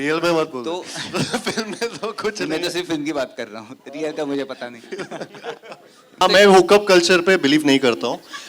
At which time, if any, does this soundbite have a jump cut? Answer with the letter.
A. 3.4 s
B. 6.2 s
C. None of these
B